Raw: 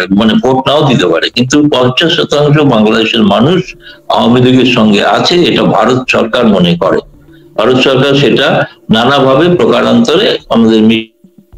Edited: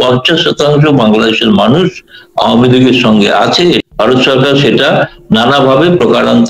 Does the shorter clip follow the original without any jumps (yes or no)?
no